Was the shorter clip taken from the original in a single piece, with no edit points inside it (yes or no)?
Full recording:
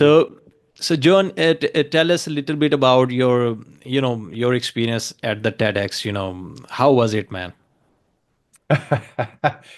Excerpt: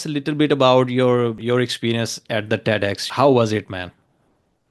no